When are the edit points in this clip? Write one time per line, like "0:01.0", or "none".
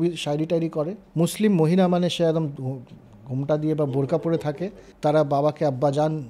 0:01.0
0:04.8